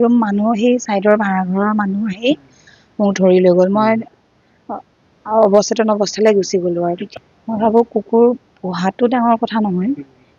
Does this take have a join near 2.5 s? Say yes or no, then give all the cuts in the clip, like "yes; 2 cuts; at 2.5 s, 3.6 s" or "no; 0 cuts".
no; 1 cut; at 7.1 s